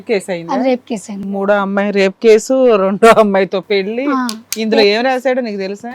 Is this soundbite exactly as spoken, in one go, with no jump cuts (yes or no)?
no